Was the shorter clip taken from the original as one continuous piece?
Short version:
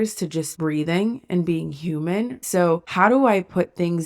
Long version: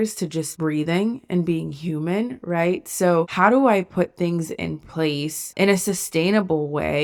no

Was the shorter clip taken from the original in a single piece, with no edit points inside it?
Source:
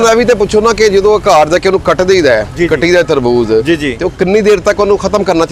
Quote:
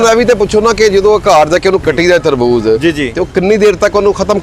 no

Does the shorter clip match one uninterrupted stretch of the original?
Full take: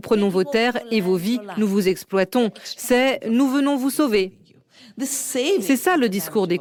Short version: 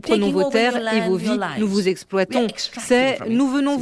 yes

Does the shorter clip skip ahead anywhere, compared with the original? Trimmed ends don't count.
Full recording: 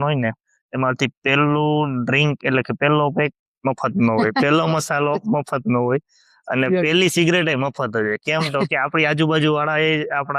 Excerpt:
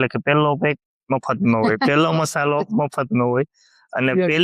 no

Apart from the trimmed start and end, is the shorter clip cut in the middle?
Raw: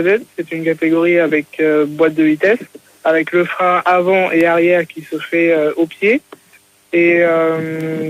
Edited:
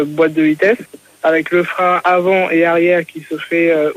no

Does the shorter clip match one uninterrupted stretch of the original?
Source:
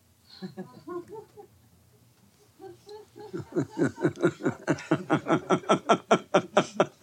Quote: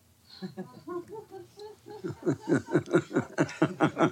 no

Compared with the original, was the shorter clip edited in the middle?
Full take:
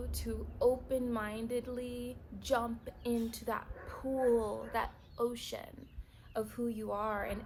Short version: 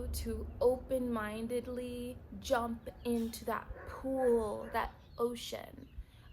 no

